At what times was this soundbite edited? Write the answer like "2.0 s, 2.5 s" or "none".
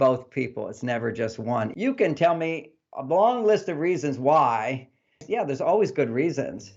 1.7 s, 5.2 s